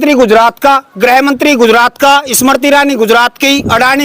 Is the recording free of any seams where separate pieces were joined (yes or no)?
yes